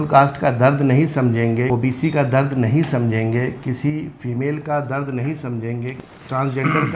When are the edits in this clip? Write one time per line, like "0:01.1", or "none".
0:01.7
0:05.9